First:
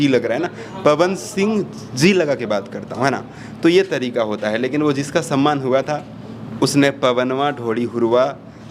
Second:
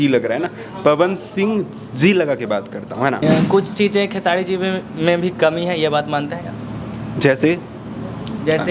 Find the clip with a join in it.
second; 1 cut; at 3.2 s

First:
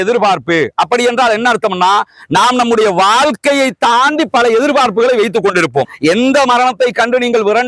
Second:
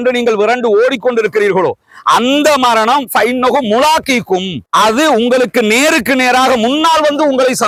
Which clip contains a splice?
first; 1 cut; at 5.9 s

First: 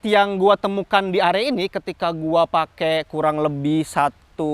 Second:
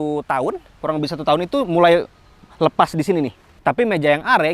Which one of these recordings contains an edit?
second; 1 cut; at 3.5 s

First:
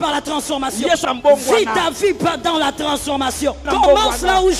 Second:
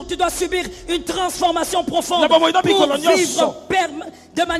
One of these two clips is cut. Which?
first; 2 cuts; at 1.0 s, 3.6 s

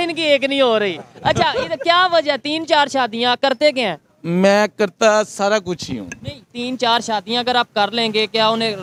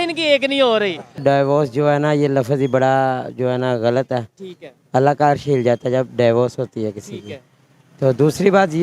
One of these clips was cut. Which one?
second; 1 cut; at 1.2 s

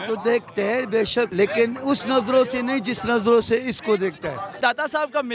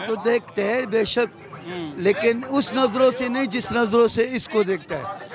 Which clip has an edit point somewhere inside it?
first; 2 cuts; at 1.3 s, 4.6 s

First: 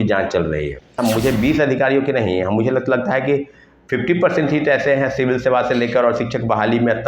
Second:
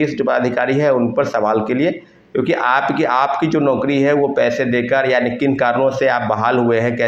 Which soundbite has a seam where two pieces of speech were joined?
first; 1 cut; at 1.0 s

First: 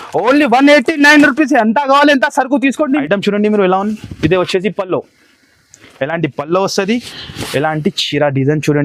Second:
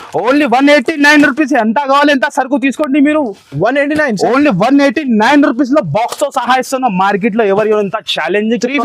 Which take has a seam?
first; 1 cut; at 3.0 s

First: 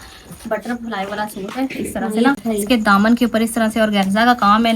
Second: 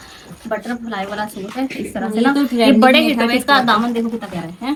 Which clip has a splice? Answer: first; 1 cut; at 2.3 s

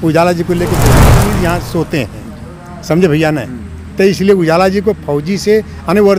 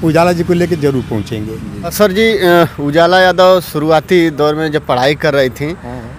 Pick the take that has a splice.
first; 1 cut; at 1.2 s

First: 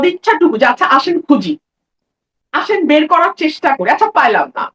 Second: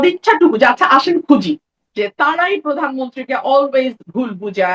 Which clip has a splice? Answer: second; 1 cut; at 1.8 s

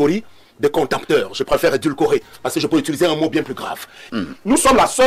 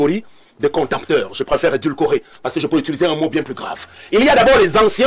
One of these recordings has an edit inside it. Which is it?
first; 1 cut; at 3.9 s

